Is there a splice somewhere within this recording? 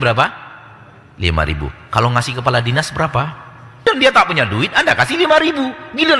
yes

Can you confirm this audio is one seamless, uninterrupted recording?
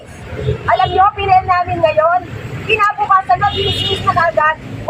yes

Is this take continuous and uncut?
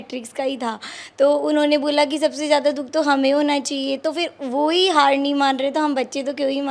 yes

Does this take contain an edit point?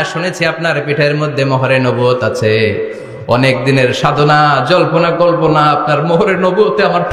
no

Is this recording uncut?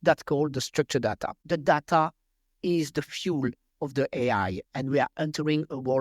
no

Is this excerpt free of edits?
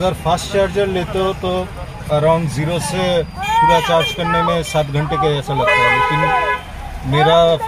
yes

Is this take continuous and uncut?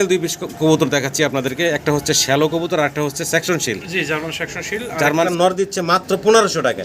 no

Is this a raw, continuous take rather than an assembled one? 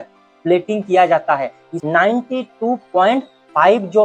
no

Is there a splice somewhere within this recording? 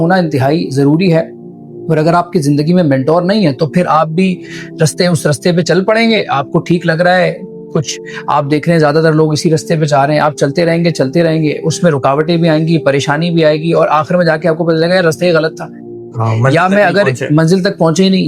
no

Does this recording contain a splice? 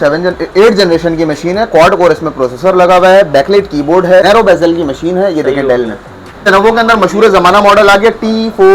yes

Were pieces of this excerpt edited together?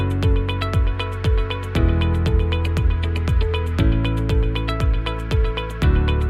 yes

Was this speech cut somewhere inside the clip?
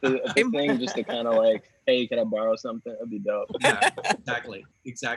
yes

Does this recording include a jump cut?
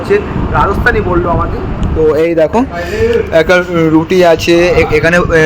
no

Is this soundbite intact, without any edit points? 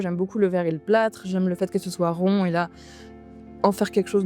yes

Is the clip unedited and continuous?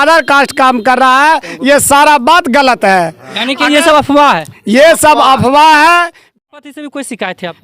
no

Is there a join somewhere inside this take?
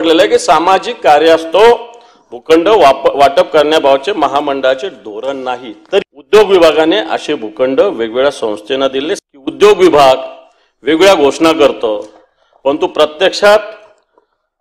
yes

